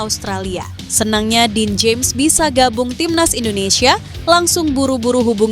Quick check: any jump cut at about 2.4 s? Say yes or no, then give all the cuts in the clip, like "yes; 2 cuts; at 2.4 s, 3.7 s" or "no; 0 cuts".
no; 1 cut; at 1.2 s